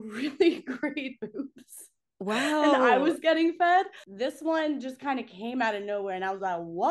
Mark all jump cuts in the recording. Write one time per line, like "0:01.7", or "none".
0:04.0